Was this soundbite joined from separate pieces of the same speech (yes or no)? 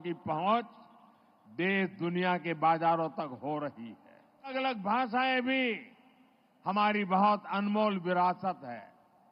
yes